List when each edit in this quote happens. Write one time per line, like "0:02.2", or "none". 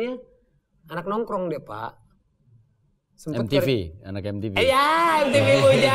none